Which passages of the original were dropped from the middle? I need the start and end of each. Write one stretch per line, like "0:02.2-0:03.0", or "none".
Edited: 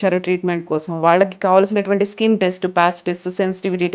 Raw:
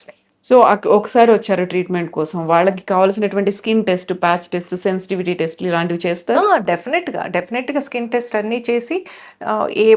none